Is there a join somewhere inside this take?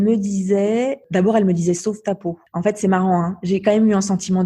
yes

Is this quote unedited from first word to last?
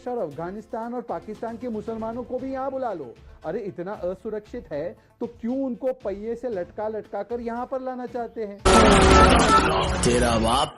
no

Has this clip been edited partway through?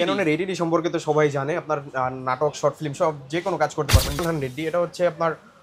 yes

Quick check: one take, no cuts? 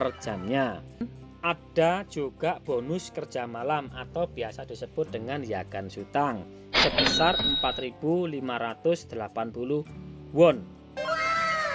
no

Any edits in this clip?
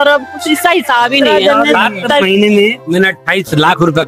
yes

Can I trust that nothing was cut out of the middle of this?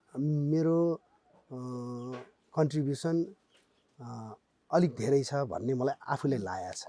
yes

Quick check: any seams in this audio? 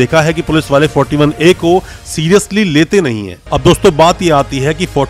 yes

